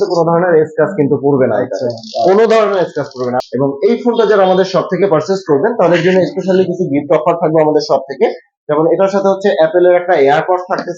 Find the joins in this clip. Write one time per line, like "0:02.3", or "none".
0:03.4